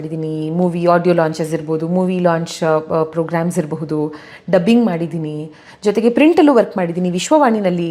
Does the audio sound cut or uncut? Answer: uncut